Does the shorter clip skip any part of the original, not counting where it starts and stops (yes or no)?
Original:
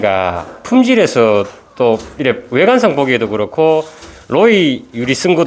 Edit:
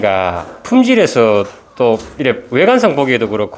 no